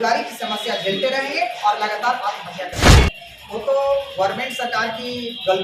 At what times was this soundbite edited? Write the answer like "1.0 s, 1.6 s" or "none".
2.8 s